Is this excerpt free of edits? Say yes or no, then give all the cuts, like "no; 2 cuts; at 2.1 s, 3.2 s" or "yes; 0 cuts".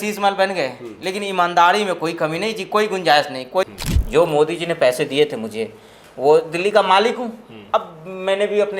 no; 1 cut; at 3.7 s